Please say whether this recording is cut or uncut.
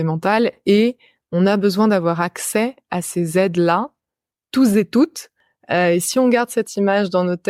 uncut